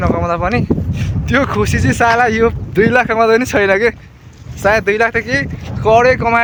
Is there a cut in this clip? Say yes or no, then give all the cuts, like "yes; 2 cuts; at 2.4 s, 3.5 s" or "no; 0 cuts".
no; 0 cuts